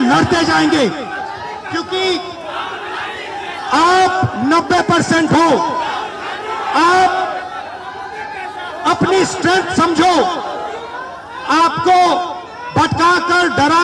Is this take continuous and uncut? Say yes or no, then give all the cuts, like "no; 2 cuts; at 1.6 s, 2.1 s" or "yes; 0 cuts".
yes; 0 cuts